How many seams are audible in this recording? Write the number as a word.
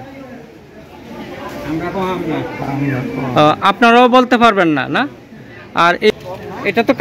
one